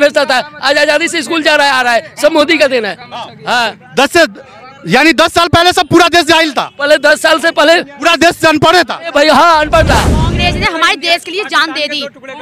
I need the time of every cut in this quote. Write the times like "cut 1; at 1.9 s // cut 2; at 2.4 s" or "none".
cut 1; at 10.2 s